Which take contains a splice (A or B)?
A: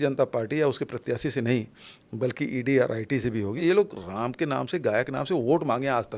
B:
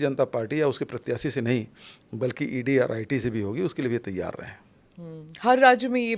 A